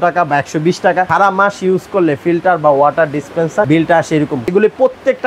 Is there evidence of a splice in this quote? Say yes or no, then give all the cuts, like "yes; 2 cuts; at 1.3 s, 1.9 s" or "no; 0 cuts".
yes; 3 cuts; at 1.1 s, 3.7 s, 4.5 s